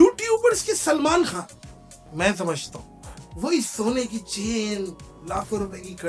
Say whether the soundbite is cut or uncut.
uncut